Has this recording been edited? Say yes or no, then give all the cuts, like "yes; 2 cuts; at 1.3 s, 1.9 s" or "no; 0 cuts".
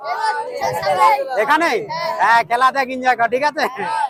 no; 0 cuts